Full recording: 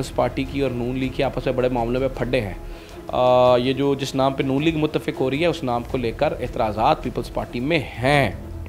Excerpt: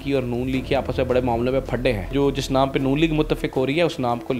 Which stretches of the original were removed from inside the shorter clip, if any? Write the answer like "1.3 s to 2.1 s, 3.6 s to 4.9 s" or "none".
2.6 s to 3.8 s